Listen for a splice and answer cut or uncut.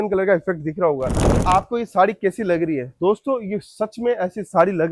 cut